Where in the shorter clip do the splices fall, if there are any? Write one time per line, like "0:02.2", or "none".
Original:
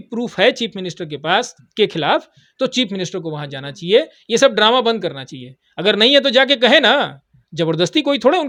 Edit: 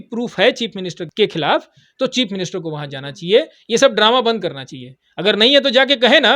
0:01.0